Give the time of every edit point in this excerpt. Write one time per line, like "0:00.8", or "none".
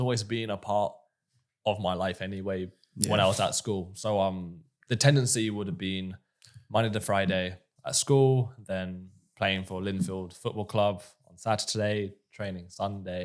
none